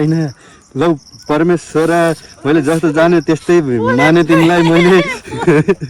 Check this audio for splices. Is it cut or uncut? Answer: uncut